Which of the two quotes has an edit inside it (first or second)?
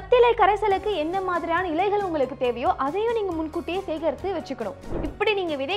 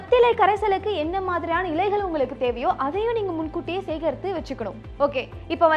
first